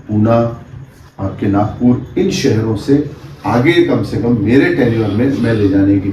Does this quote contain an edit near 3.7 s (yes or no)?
no